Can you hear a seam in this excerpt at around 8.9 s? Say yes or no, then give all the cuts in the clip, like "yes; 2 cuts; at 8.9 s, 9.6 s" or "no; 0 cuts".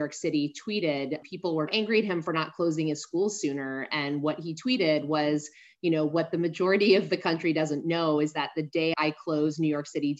yes; 2 cuts; at 1.7 s, 8.9 s